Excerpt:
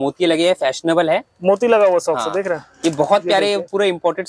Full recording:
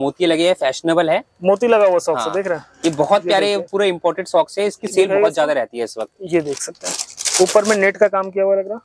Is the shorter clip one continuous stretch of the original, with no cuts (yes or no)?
yes